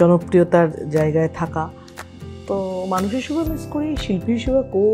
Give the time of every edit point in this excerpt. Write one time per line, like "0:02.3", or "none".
none